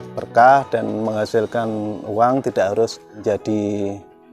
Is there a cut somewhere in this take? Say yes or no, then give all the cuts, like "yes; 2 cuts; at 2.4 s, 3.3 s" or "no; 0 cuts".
yes; 1 cut; at 3.2 s